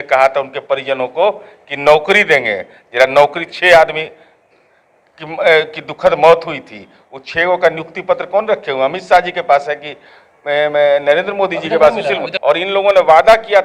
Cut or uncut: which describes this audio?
cut